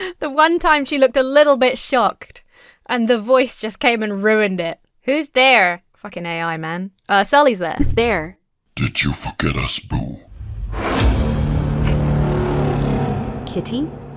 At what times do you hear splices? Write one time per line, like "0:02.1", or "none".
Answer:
none